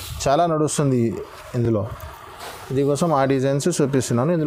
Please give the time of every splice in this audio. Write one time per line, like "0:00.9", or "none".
none